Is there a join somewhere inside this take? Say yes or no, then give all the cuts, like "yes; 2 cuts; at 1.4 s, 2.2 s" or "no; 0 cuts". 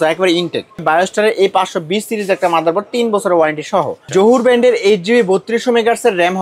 yes; 2 cuts; at 0.8 s, 4.0 s